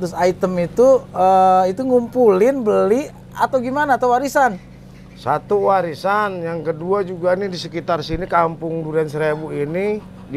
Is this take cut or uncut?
uncut